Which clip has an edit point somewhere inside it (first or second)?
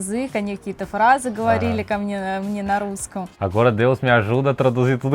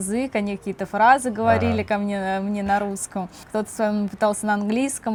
first